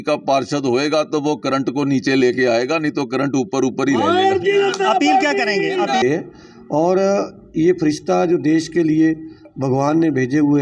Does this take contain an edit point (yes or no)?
yes